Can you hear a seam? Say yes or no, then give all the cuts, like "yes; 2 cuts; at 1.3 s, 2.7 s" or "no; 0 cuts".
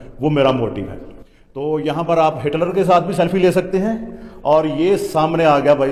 no; 0 cuts